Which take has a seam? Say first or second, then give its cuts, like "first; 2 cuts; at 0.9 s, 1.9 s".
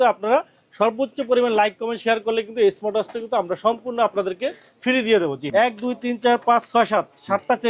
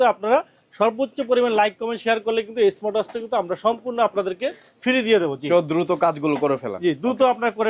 first; 1 cut; at 5.4 s